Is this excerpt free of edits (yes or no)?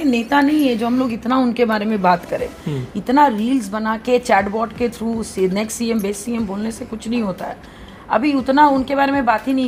yes